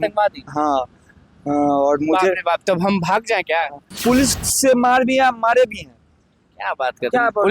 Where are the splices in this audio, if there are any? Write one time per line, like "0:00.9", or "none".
0:03.8